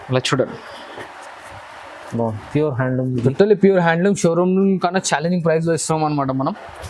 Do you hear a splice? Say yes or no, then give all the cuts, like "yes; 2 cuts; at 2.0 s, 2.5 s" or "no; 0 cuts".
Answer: no; 0 cuts